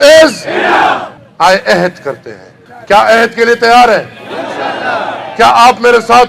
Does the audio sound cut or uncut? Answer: uncut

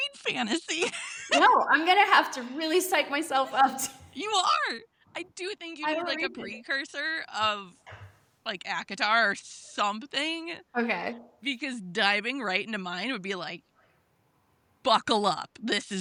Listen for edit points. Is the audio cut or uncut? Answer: uncut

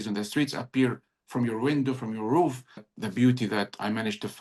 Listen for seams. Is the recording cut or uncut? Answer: cut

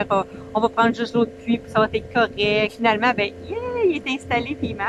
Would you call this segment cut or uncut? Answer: cut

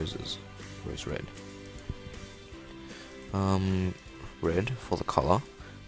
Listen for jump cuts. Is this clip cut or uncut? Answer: uncut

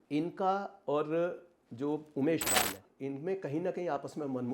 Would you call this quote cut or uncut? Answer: cut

